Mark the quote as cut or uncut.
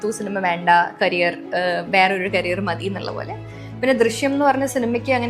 cut